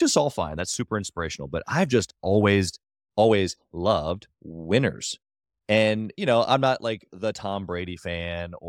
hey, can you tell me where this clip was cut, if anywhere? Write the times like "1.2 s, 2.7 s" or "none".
none